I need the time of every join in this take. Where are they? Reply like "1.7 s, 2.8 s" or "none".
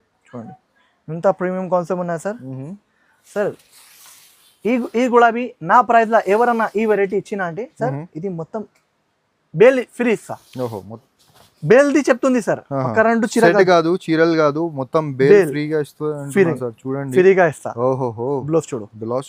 none